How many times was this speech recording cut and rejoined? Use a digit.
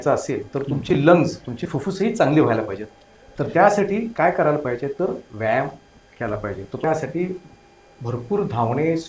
1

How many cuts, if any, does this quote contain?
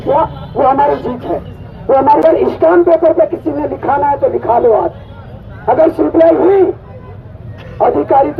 1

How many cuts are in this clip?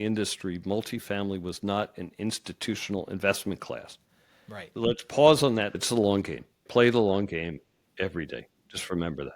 2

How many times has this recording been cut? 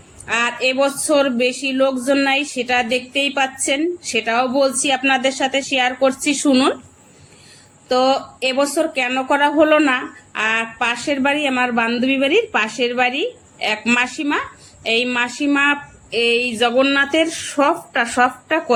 0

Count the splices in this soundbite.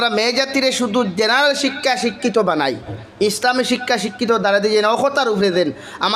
0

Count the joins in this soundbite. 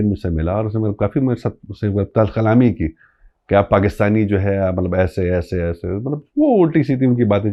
0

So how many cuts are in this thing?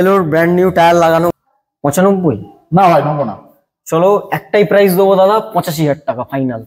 1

